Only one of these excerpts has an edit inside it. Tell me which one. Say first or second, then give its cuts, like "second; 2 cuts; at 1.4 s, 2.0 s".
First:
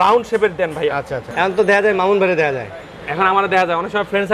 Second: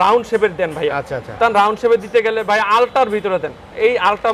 first; 1 cut; at 1.2 s